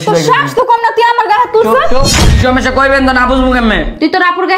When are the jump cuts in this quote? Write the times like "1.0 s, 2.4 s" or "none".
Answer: 2.4 s